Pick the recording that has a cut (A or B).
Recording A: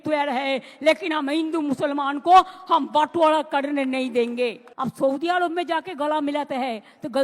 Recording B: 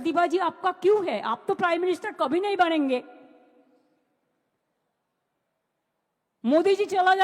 A